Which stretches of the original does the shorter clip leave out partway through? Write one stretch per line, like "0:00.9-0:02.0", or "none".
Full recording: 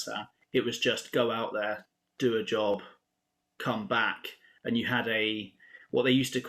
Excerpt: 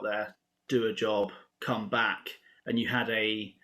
0:03.0-0:03.5